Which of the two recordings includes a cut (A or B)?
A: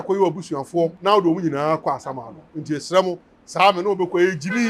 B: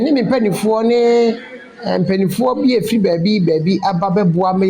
A